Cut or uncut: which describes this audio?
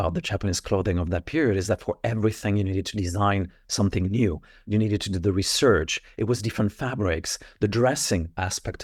uncut